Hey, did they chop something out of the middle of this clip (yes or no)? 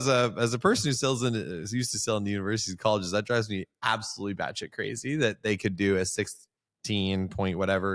no